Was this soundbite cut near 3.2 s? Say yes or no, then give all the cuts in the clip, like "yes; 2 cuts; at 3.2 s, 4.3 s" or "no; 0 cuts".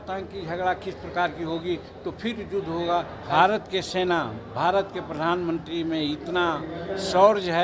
yes; 1 cut; at 3.2 s